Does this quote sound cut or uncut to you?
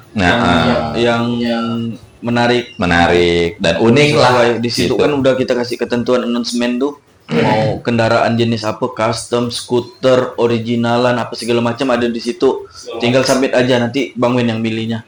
uncut